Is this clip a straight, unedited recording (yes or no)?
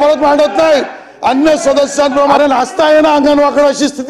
no